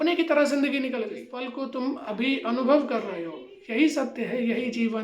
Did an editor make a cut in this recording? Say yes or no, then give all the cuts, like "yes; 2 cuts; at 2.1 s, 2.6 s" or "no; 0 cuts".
yes; 1 cut; at 1.4 s